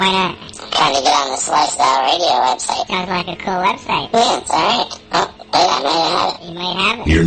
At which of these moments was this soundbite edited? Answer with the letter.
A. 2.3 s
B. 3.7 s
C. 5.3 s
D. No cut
D